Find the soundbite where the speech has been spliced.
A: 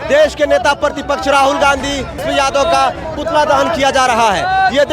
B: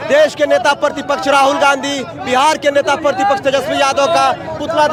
A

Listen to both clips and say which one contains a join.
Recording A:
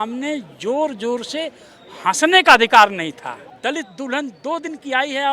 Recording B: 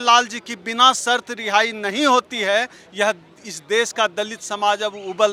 A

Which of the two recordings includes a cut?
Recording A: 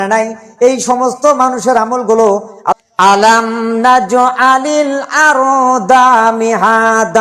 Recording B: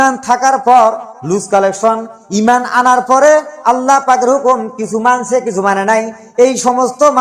A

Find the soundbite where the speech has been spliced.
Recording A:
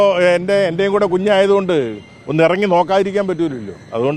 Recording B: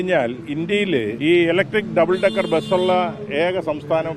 B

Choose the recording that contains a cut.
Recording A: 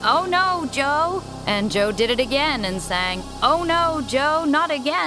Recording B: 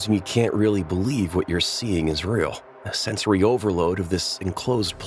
A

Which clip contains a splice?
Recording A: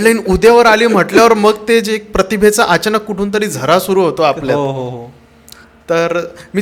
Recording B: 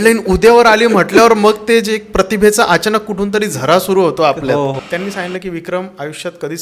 B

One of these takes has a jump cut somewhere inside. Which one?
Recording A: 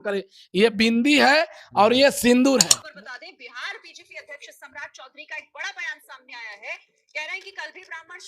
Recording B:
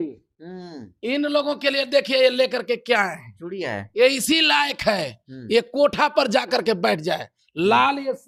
A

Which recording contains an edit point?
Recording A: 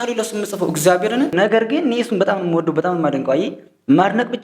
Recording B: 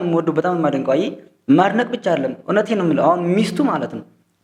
A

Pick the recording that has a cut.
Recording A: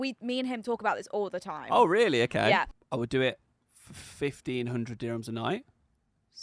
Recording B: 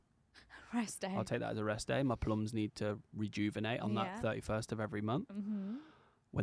A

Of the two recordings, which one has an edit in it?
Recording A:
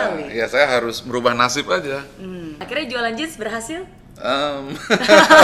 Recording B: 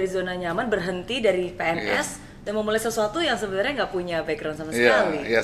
A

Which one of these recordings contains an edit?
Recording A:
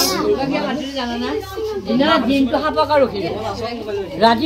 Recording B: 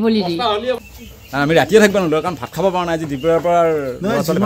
B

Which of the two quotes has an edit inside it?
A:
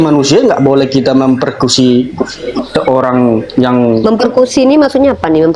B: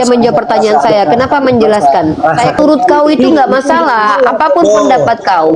B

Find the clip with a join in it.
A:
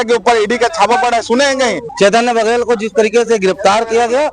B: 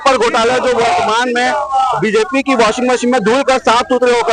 A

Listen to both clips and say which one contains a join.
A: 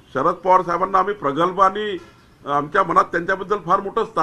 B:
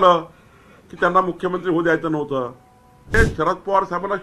B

